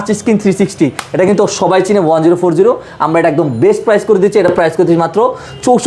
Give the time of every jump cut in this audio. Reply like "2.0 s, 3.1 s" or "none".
none

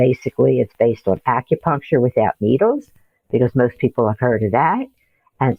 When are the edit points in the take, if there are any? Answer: none

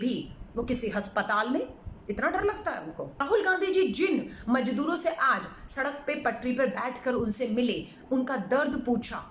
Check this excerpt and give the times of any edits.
3.2 s

